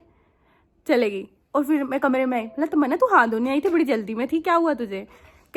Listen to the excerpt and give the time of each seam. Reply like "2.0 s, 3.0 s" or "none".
none